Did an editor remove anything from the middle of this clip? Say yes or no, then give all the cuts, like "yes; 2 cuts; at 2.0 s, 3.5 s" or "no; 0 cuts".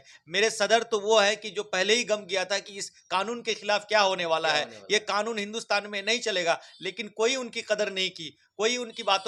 no; 0 cuts